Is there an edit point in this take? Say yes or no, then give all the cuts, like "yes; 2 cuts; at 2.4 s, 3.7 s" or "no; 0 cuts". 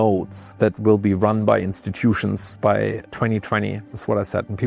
no; 0 cuts